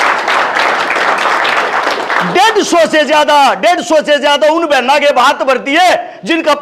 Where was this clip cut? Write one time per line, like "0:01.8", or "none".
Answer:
none